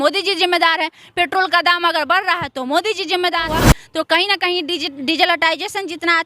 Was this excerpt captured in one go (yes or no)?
no